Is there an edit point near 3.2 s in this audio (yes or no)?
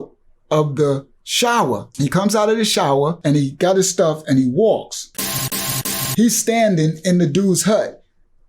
yes